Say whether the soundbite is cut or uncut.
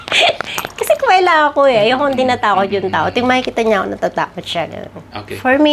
uncut